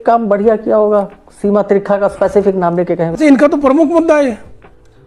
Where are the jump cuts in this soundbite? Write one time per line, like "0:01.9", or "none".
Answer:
0:03.2